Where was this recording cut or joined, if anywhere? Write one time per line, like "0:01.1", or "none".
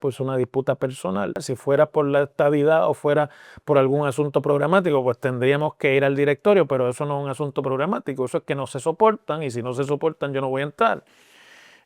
0:01.5